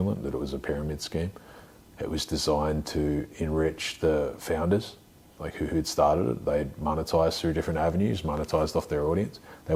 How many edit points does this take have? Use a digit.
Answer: 0